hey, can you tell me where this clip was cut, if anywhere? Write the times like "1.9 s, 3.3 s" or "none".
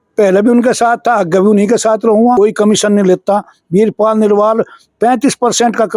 2.4 s